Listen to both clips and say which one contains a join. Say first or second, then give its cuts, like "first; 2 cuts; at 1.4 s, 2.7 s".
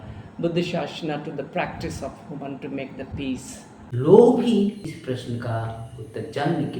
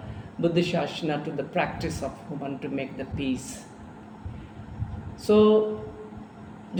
first; 2 cuts; at 3.9 s, 4.8 s